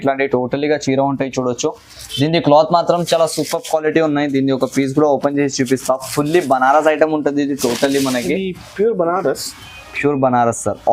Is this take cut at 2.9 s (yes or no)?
no